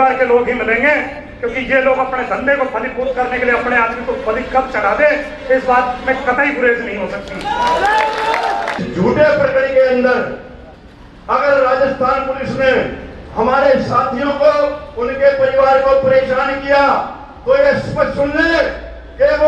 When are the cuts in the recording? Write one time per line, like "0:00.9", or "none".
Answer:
0:08.8